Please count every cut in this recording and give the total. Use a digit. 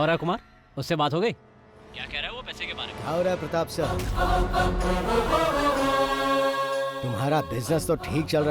0